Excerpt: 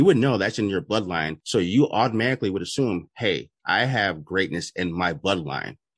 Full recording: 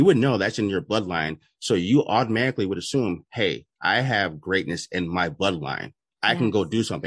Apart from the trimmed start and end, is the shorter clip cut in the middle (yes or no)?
yes